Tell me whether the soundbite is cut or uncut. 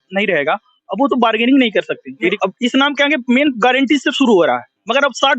cut